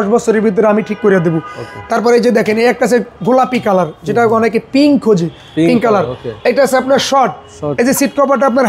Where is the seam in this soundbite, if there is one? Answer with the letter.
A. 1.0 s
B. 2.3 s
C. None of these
C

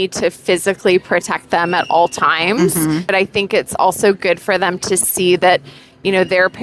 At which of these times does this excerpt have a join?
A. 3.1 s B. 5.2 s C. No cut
A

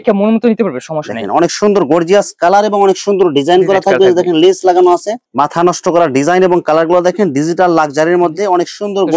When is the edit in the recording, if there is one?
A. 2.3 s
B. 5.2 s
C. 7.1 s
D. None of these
B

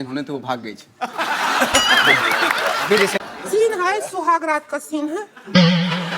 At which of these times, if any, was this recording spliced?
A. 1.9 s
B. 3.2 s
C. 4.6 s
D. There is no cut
B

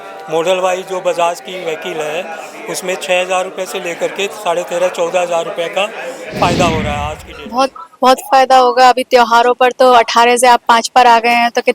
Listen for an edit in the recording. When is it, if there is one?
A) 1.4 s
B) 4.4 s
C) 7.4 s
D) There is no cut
C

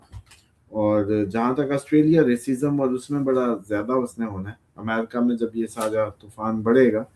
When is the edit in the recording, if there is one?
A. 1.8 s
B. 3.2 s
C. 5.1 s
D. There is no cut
D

